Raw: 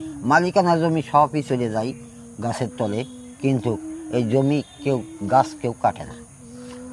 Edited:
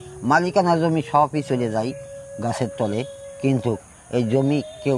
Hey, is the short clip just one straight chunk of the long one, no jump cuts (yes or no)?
yes